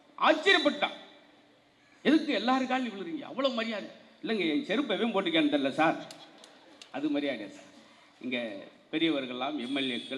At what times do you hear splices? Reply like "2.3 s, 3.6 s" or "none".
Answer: none